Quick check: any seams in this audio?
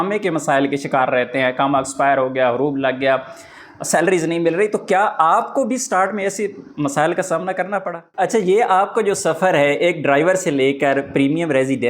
yes; 1 cut; at 8.0 s

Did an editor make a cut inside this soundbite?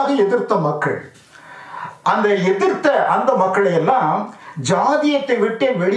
no; 0 cuts

